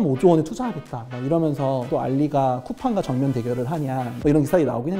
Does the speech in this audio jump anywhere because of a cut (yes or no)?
no